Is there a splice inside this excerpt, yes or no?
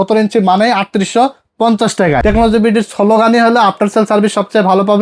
yes